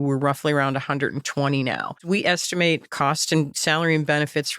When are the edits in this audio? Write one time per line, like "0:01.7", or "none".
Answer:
0:02.0
0:03.1